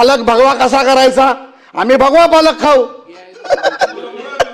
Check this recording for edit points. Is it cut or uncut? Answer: uncut